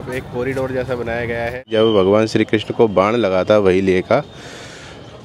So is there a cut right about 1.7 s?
yes; 1 cut; at 1.7 s

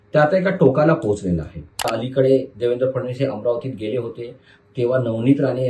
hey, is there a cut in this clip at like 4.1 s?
no; 1 cut; at 1.9 s

